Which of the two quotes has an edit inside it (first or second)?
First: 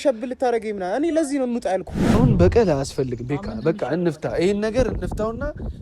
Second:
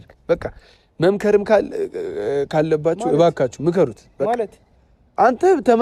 first